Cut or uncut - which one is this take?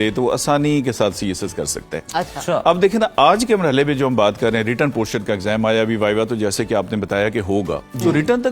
uncut